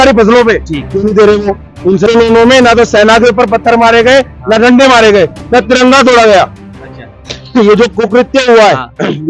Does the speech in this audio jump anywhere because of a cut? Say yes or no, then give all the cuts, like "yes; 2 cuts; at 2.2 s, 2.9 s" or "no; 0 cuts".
yes; 1 cut; at 2.1 s